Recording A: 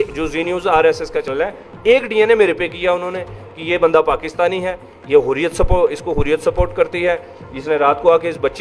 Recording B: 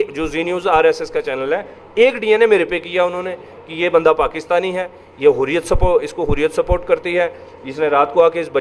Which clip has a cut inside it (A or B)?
A